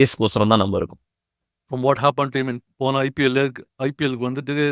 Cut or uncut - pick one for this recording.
cut